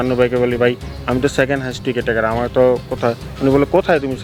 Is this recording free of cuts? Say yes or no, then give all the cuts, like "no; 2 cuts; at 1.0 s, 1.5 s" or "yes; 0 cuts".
yes; 0 cuts